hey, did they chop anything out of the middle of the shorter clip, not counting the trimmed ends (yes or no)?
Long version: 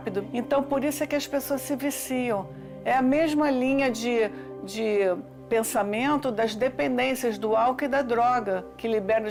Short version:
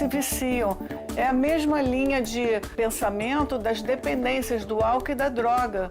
yes